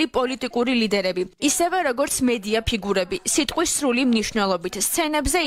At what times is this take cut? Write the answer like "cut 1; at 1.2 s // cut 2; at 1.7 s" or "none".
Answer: cut 1; at 1.3 s